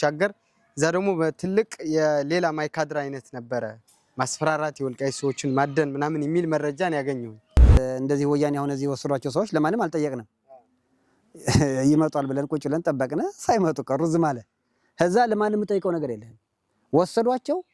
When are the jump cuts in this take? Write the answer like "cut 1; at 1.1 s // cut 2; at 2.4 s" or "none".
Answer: cut 1; at 7.8 s